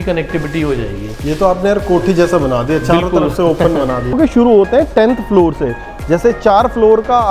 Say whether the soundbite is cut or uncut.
cut